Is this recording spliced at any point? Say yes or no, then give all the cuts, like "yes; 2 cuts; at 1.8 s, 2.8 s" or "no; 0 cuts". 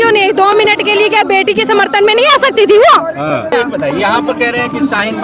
no; 0 cuts